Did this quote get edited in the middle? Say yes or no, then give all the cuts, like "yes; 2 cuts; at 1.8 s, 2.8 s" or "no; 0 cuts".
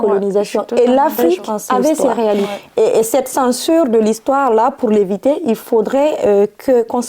yes; 1 cut; at 2.5 s